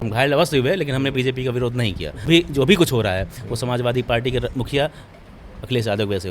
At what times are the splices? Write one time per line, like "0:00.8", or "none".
0:02.3